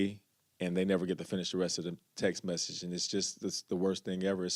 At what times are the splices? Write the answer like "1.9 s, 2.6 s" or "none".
none